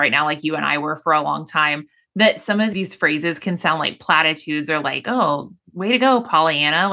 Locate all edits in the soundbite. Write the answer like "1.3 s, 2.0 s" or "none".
2.7 s